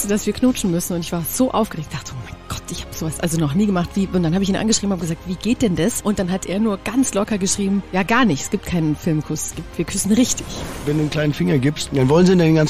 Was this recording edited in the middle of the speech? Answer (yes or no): yes